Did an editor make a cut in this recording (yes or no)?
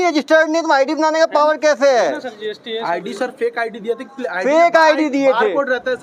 no